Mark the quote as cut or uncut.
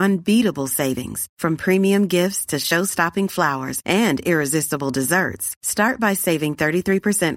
uncut